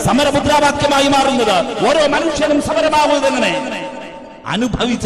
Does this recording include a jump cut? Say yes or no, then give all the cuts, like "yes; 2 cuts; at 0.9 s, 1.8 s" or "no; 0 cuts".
no; 0 cuts